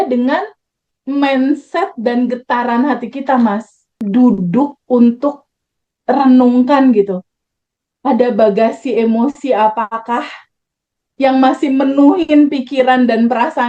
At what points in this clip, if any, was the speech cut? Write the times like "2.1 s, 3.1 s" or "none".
3.9 s